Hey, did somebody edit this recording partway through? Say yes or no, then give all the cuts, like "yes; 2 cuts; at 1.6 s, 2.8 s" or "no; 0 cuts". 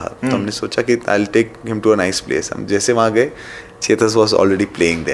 no; 0 cuts